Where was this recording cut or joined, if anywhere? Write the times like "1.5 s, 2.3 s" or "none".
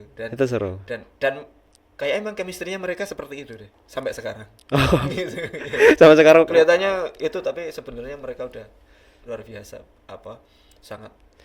none

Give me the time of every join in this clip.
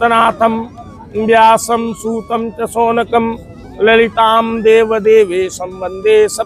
none

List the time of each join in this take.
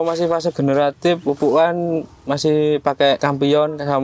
1.2 s, 3.2 s

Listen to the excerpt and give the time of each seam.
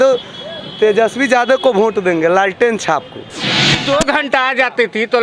3.7 s

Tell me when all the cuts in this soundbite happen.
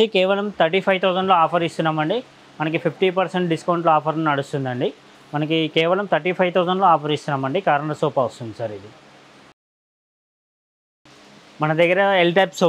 none

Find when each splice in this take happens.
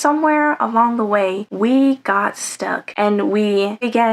2.9 s

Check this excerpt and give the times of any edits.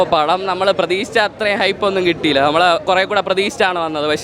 none

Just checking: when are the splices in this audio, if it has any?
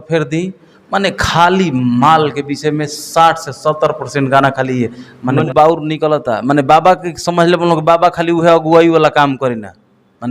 5.5 s

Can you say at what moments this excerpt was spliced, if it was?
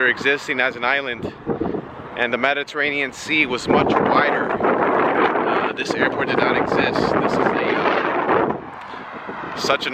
none

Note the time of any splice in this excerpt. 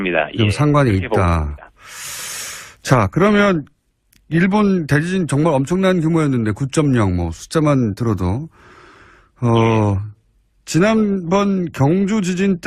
none

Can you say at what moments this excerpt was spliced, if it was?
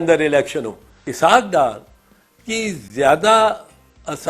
1.0 s

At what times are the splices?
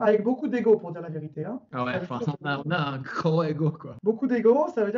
4.0 s

